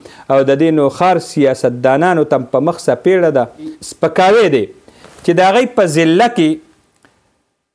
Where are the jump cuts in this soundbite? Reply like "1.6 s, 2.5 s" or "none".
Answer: 3.8 s

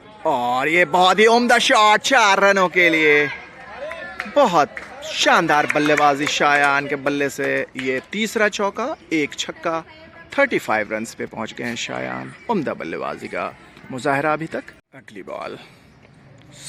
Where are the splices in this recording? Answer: none

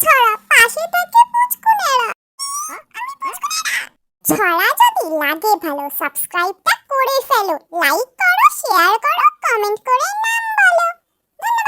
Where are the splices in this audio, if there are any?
none

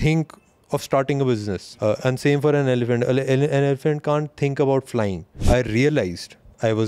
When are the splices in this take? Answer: 1.6 s, 5.3 s

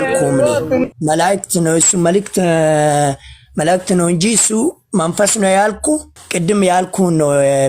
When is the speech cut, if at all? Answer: 1.0 s, 6.2 s

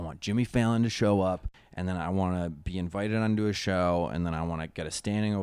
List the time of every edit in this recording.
1.5 s

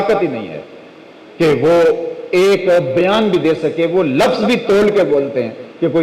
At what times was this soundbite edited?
none

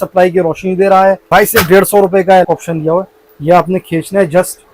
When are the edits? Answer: 1.3 s, 2.5 s

